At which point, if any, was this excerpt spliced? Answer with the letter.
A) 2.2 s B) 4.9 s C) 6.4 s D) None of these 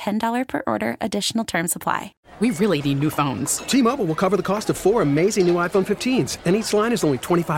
A